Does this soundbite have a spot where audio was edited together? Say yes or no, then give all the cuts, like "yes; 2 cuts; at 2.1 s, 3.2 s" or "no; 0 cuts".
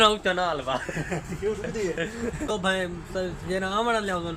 yes; 1 cut; at 2.5 s